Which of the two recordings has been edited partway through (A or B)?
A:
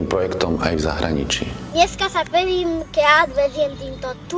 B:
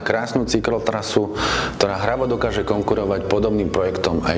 A